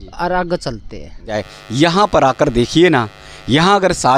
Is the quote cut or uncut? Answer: cut